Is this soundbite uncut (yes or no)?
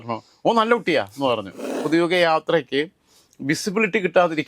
no